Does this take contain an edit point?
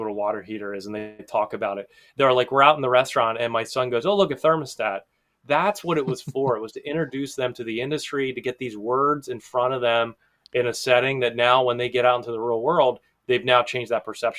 no; 0 cuts

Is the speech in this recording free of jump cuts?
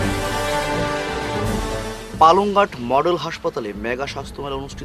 no; 1 cut; at 1.6 s

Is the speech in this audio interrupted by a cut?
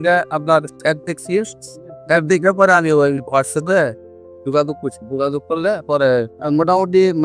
yes; 1 cut; at 6.3 s

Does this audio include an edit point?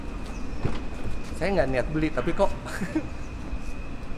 no; 0 cuts

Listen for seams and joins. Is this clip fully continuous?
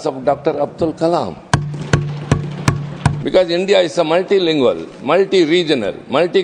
no; 1 cut; at 3.2 s

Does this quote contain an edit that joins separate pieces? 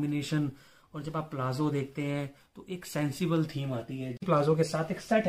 yes; 1 cut; at 4.2 s

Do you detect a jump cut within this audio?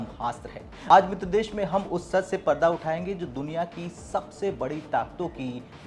no; 0 cuts

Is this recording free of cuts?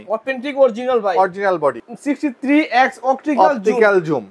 no; 1 cut; at 1.9 s

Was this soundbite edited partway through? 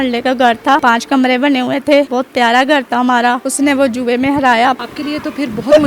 yes; 4 cuts; at 0.8 s, 2.1 s, 3.5 s, 4.9 s

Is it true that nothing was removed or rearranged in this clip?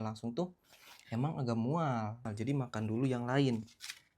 no; 1 cut; at 2.3 s

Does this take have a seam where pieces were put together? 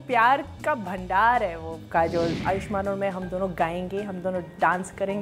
yes; 1 cut; at 2.3 s

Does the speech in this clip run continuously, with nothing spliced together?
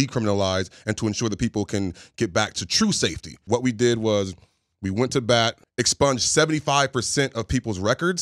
no; 2 cuts; at 3.4 s, 5.6 s

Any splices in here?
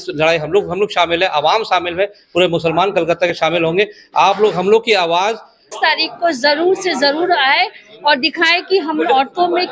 yes; 1 cut; at 5.7 s

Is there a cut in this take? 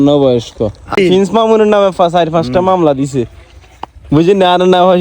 yes; 1 cut; at 0.9 s

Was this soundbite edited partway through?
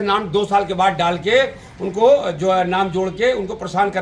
no; 0 cuts

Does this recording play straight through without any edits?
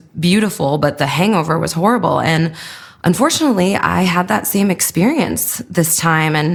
yes; 0 cuts

